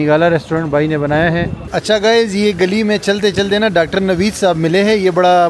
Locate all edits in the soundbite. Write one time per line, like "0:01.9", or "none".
0:01.6

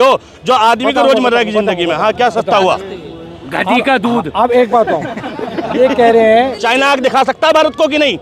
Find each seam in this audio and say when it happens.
0:06.6

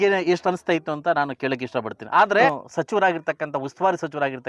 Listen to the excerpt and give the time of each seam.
0:02.5

